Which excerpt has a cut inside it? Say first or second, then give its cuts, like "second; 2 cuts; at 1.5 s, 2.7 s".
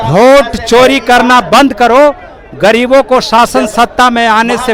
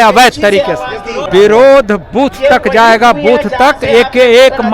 second; 1 cut; at 1.3 s